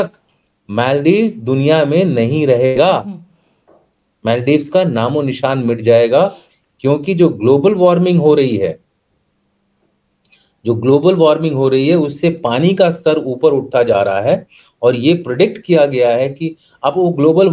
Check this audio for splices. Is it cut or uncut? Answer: uncut